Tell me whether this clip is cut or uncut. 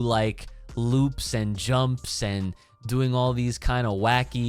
uncut